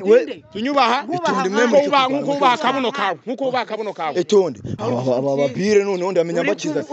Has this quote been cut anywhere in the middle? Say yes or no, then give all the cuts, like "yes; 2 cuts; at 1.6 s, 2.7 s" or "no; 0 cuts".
yes; 1 cut; at 4.7 s